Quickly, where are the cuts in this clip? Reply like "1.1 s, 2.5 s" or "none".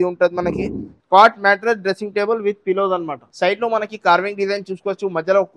0.9 s, 3.2 s